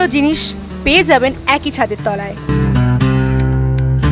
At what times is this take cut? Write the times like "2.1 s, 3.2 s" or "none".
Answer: none